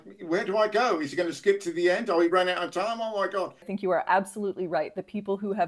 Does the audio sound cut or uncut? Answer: cut